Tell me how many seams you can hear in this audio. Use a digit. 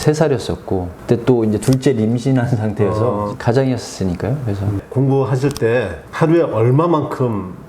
2